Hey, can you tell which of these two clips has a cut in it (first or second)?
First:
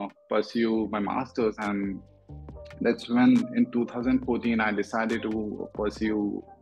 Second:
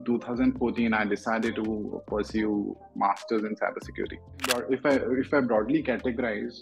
second